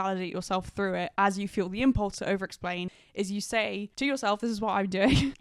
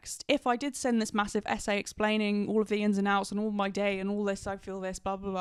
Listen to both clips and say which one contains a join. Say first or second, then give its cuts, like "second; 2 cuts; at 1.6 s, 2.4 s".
first; 2 cuts; at 3.0 s, 3.9 s